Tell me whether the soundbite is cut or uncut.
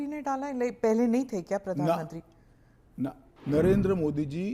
cut